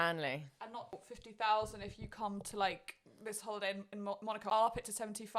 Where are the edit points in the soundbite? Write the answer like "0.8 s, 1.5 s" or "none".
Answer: 1.0 s, 4.4 s

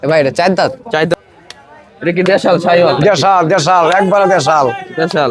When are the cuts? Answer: 1.1 s

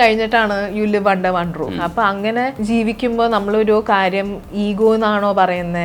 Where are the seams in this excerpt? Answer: 1.7 s, 2.5 s

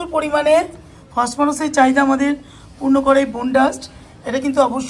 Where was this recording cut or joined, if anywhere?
none

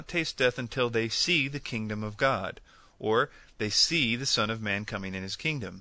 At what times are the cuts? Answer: 4.6 s

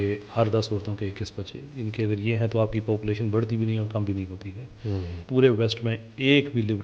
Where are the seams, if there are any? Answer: 5.1 s

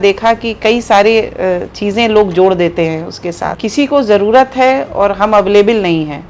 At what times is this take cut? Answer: 3.5 s

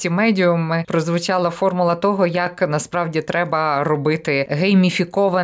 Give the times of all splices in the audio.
0.8 s, 4.5 s

